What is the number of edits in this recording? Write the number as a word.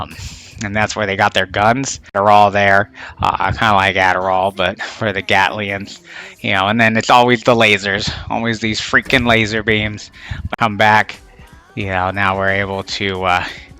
two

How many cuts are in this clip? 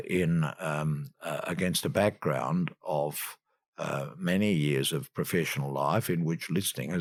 zero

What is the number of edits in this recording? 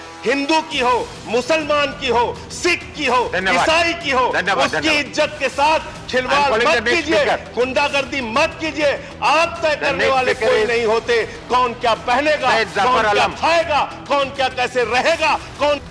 zero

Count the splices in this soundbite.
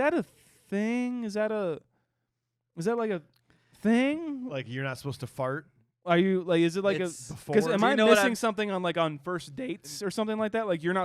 zero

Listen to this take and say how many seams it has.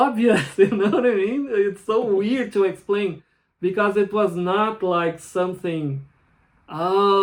zero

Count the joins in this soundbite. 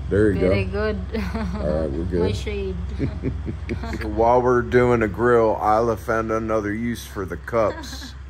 one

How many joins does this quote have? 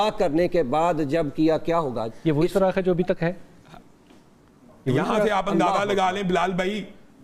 zero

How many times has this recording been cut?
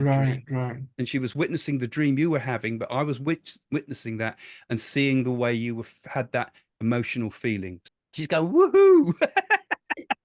one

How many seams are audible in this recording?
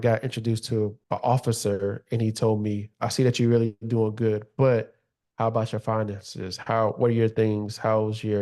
one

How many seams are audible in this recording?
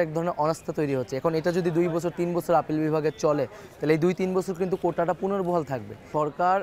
zero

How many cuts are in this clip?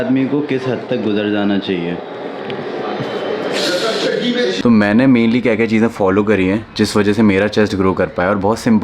one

